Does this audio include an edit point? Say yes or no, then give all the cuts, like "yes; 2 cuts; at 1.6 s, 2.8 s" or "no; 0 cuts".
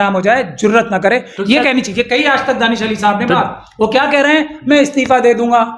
no; 0 cuts